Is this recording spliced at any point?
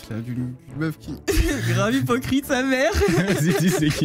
no; 0 cuts

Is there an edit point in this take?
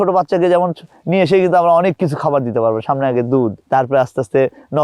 yes; 1 cut; at 3.6 s

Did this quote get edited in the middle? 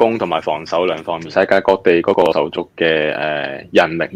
yes; 1 cut; at 1.3 s

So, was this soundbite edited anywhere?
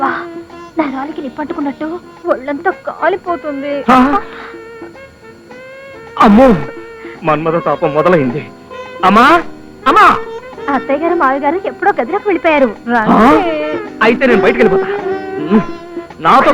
no; 0 cuts

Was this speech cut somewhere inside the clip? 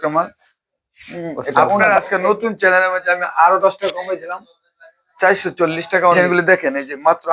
yes; 2 cuts; at 1.8 s, 6.4 s

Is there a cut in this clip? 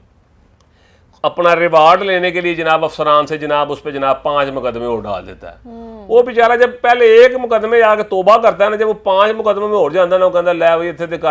no; 0 cuts

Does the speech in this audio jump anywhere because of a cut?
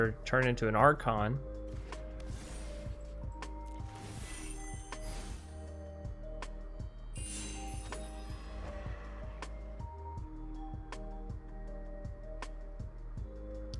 no; 0 cuts

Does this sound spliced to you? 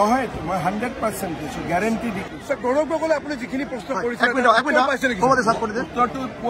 no; 0 cuts

